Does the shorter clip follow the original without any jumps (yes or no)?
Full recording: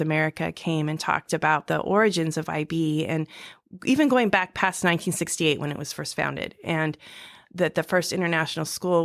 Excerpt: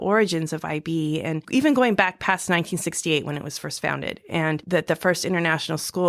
no